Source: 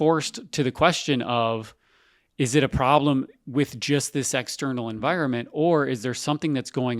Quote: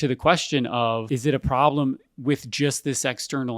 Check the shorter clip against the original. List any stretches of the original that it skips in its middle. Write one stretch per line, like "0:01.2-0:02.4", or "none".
0:01.6-0:02.3